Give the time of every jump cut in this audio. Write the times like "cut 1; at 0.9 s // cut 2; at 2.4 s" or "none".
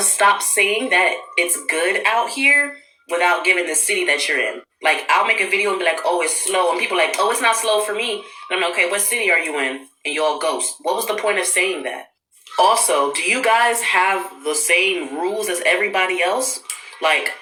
none